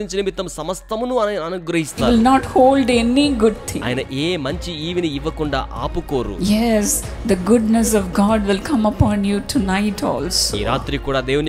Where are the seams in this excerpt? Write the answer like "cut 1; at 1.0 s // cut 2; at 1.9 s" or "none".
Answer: cut 1; at 2.0 s